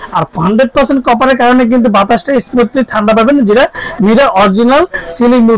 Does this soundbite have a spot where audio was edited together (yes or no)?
no